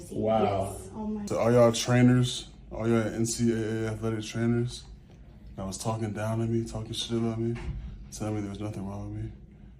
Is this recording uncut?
no; 1 cut; at 1.3 s

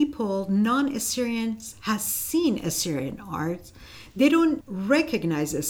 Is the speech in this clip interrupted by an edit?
yes; 1 cut; at 4.7 s

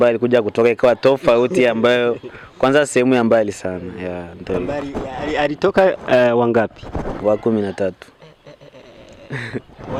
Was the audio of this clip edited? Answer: no; 0 cuts

